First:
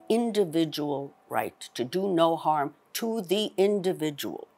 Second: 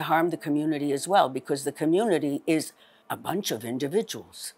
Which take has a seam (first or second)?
second